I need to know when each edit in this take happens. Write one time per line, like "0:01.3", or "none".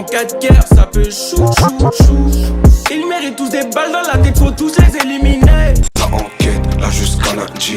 0:05.9